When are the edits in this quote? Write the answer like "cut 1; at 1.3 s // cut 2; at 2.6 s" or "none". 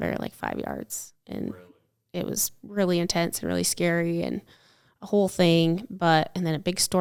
none

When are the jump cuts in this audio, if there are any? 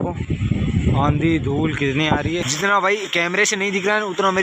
cut 1; at 2.5 s

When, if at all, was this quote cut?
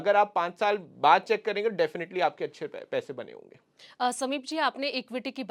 none

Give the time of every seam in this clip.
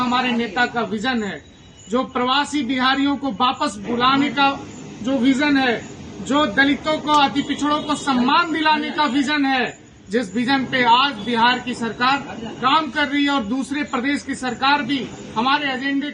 none

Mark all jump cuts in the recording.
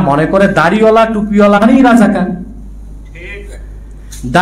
cut 1; at 1.6 s

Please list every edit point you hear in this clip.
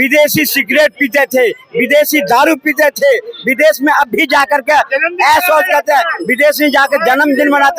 none

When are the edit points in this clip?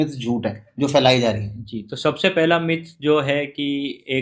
none

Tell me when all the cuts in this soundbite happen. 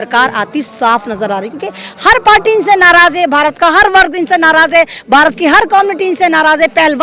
none

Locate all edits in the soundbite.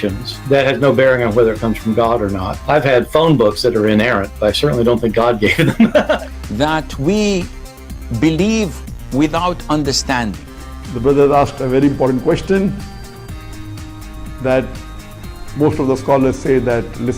cut 1; at 6.1 s

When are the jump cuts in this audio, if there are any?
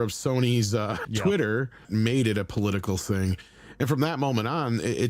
cut 1; at 1.0 s // cut 2; at 1.8 s

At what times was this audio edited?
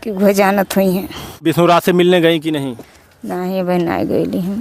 cut 1; at 1.4 s

